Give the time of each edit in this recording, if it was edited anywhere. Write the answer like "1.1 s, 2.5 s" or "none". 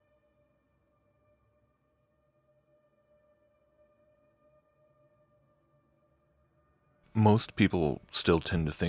7.7 s